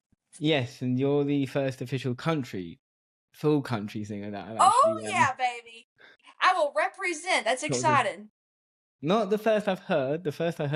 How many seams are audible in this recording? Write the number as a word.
zero